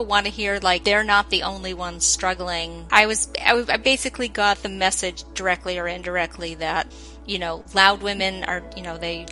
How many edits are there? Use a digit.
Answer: 1